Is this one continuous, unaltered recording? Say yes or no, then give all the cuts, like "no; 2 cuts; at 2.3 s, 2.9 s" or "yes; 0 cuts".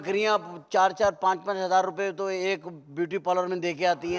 yes; 0 cuts